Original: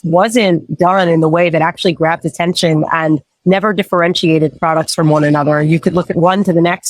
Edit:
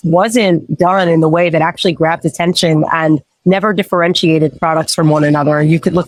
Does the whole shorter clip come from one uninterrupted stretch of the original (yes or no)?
yes